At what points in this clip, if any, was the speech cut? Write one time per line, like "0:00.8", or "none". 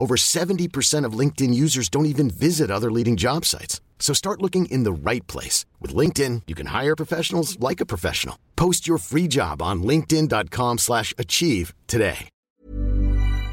0:12.4